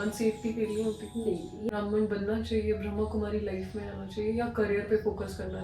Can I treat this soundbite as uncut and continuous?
no; 1 cut; at 1.7 s

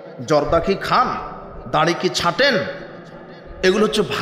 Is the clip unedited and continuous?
yes; 0 cuts

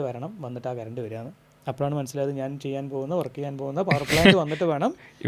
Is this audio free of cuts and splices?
yes; 0 cuts

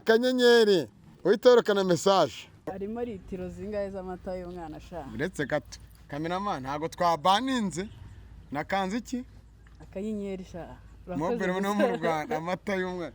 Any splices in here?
yes; 1 cut; at 2.7 s

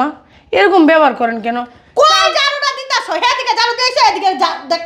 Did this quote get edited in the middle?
no; 0 cuts

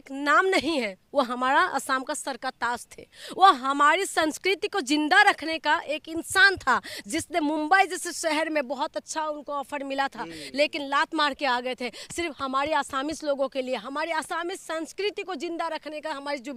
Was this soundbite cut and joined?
no; 0 cuts

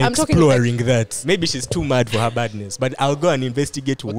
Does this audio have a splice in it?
yes; 1 cut; at 1.1 s

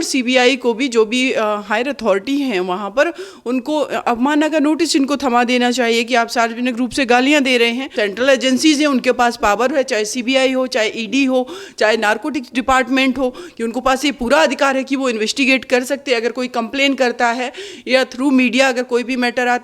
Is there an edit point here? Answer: yes; 1 cut; at 7.8 s

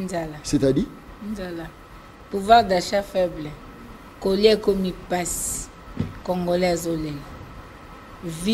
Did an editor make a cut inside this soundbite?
no; 0 cuts

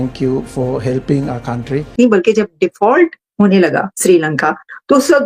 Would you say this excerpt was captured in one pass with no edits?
no; 1 cut; at 1.9 s

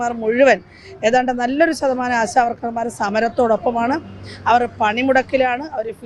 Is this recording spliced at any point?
no; 0 cuts

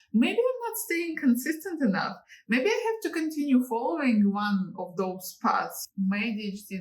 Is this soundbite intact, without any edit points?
no; 1 cut; at 5.8 s

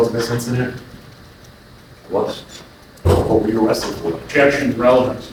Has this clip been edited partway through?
no; 0 cuts

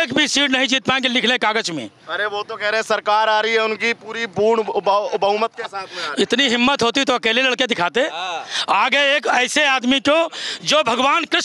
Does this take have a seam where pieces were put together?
no; 0 cuts

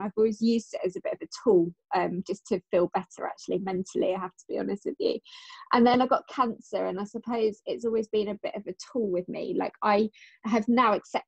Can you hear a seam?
no; 0 cuts

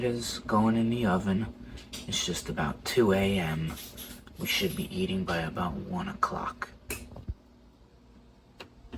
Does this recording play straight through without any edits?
yes; 0 cuts

